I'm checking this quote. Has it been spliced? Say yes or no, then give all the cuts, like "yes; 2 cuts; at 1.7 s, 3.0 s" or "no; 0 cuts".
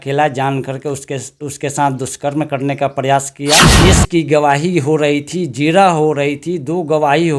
yes; 1 cut; at 3.7 s